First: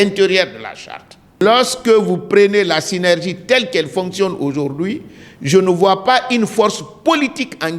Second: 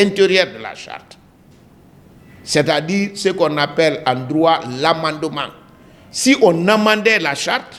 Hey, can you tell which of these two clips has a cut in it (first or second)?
first